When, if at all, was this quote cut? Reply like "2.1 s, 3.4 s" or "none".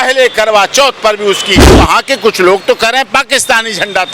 1.8 s